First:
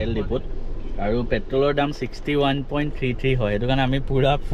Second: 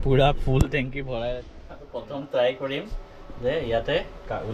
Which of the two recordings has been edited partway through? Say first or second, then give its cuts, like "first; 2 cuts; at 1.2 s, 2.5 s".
second; 1 cut; at 1.5 s